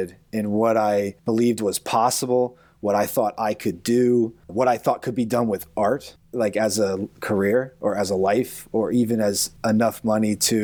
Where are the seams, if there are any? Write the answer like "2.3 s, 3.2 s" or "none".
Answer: 1.2 s, 4.4 s, 6.3 s, 9.5 s

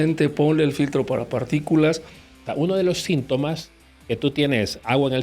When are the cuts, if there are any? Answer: 2.4 s

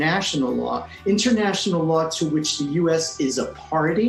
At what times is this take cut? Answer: none

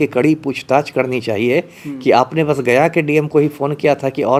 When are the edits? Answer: none

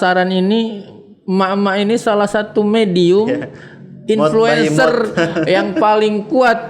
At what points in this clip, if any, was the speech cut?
none

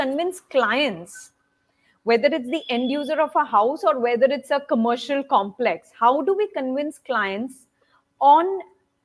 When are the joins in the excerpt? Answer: none

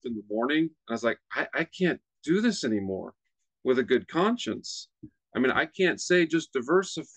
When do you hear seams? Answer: none

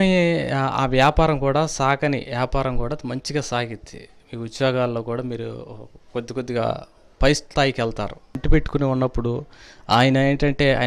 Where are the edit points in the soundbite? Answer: 8.4 s

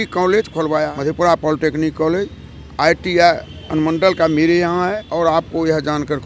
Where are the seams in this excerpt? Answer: 0.9 s, 5.0 s

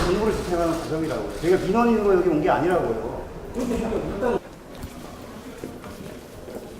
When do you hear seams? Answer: 4.0 s

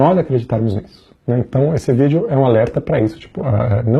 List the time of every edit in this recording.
none

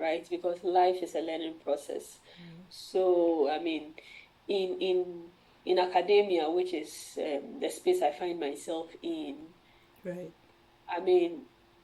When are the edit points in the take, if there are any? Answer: none

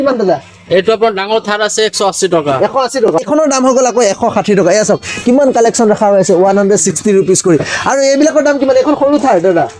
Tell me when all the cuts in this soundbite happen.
none

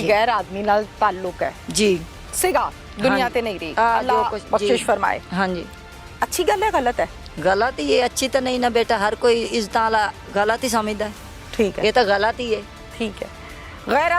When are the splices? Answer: none

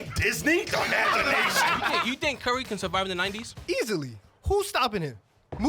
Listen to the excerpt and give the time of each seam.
2.0 s, 3.9 s

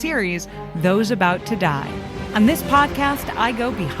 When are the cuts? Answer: 2.2 s

